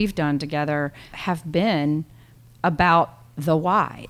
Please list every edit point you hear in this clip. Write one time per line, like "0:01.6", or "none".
0:01.2